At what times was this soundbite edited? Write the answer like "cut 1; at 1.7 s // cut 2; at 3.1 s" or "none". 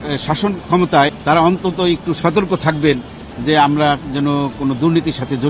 cut 1; at 1.2 s // cut 2; at 4.1 s